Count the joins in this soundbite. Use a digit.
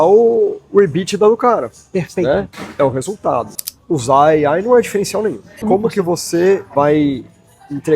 3